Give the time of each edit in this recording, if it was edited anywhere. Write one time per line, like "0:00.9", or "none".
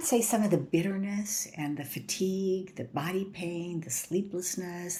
none